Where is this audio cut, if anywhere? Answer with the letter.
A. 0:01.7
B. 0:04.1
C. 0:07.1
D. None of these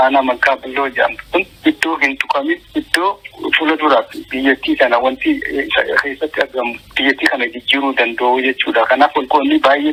D